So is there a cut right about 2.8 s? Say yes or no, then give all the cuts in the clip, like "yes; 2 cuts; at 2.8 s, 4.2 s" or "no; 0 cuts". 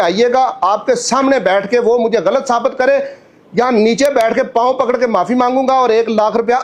no; 0 cuts